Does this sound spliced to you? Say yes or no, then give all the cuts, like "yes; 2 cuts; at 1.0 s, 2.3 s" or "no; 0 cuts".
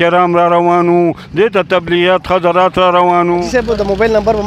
yes; 1 cut; at 3.4 s